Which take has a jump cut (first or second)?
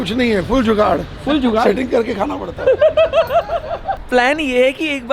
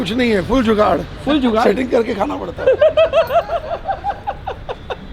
first